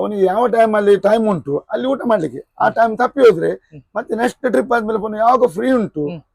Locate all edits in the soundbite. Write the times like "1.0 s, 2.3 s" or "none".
none

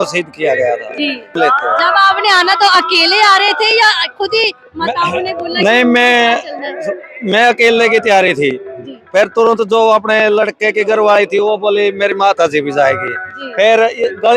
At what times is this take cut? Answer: 1.3 s

